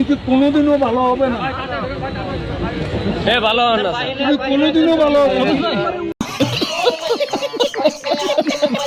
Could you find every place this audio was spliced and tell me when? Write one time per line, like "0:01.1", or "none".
0:06.2

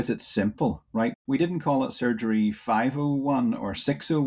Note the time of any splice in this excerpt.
0:01.1

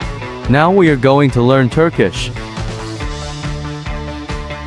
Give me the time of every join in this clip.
none

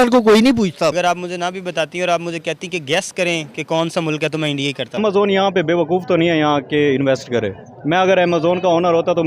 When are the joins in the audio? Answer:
0:00.9
0:05.0

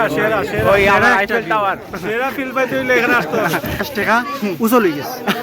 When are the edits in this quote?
0:03.8

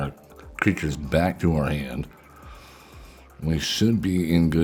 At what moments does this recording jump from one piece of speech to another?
none

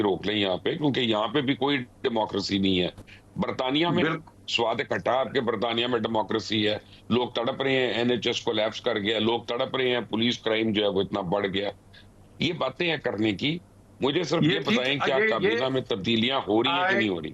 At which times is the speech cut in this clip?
none

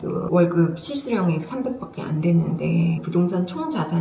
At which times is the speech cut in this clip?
0:03.0

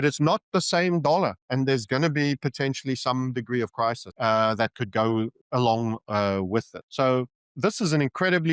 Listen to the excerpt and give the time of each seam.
0:04.1
0:05.4
0:06.8
0:07.4

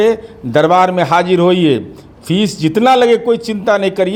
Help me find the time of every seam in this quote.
none

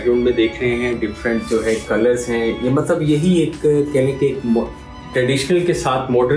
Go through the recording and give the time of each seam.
none

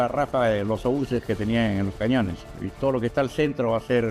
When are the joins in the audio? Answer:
0:02.5

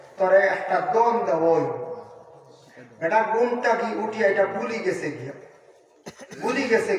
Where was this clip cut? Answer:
none

